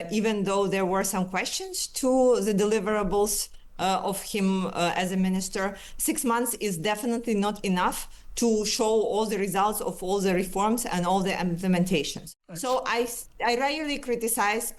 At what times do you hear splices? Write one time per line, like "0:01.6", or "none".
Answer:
0:12.6